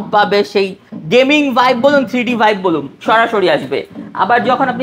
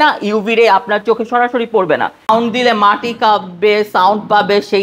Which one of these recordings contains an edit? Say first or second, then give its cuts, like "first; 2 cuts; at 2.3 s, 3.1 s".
second; 1 cut; at 2.3 s